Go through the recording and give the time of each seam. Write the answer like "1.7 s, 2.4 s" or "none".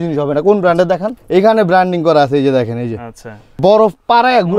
1.2 s, 3.5 s